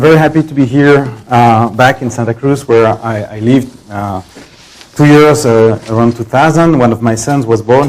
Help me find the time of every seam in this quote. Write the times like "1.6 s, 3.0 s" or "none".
none